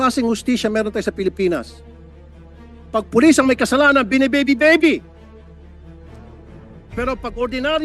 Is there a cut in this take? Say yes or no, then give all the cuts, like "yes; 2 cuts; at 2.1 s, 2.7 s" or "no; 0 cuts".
yes; 2 cuts; at 5.0 s, 6.9 s